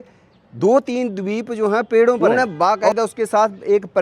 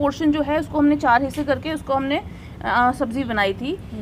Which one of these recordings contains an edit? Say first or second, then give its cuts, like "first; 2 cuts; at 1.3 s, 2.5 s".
first; 1 cut; at 2.2 s